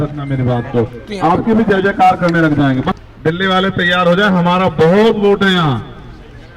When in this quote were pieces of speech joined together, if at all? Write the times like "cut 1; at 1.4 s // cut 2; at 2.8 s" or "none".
cut 1; at 3.0 s

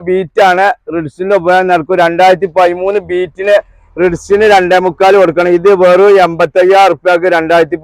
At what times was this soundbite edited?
none

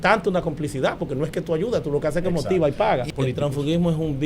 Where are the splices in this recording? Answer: cut 1; at 3.1 s

